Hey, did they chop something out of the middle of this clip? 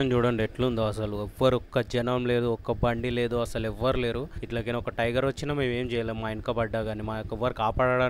no; 0 cuts

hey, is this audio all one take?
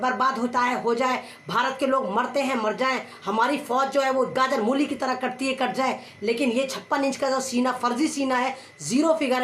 yes; 0 cuts

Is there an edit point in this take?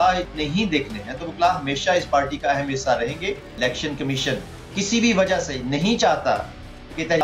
yes; 1 cut; at 3.5 s

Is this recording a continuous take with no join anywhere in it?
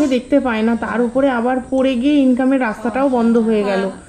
yes; 0 cuts

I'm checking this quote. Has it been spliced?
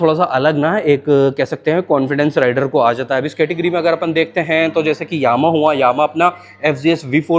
no; 0 cuts

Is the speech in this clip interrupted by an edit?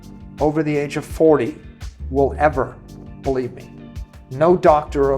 no; 0 cuts

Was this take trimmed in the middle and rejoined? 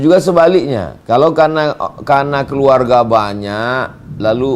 yes; 1 cut; at 0.9 s

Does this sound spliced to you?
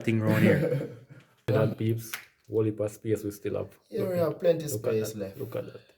yes; 1 cut; at 1.5 s

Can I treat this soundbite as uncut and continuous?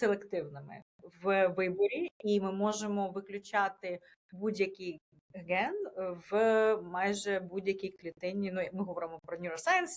yes; 0 cuts

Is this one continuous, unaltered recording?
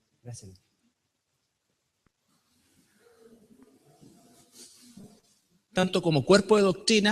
no; 1 cut; at 6.1 s

